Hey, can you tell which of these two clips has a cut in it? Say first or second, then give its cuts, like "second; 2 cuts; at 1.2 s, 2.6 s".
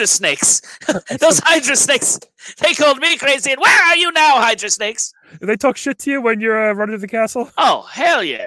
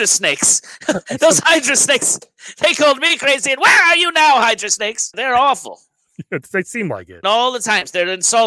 second; 2 cuts; at 5.2 s, 7.1 s